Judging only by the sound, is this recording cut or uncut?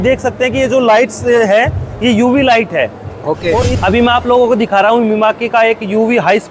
cut